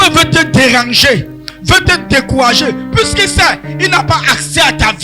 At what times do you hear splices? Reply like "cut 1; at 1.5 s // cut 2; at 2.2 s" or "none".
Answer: none